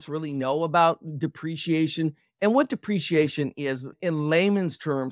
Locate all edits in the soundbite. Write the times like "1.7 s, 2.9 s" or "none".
4.0 s